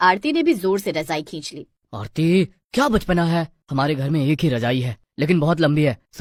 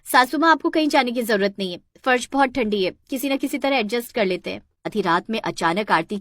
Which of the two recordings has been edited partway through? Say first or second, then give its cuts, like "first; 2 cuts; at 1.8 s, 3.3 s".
second; 1 cut; at 4.9 s